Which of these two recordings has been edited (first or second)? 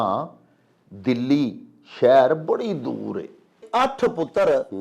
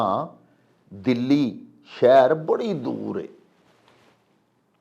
first